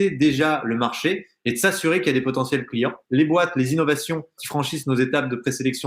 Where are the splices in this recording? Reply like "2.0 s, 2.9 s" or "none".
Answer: 3.0 s, 4.4 s